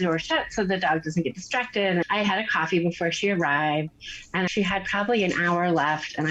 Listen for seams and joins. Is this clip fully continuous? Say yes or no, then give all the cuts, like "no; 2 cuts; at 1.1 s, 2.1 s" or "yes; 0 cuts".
no; 2 cuts; at 2.0 s, 4.5 s